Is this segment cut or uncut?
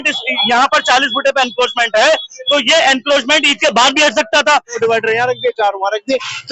cut